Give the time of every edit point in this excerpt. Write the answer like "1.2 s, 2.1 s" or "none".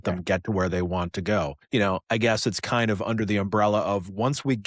1.6 s